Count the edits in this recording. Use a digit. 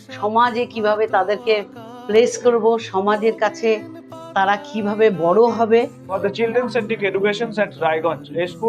1